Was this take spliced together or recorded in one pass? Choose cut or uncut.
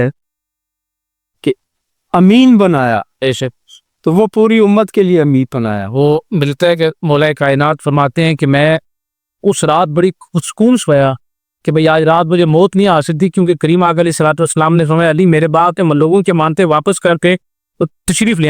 uncut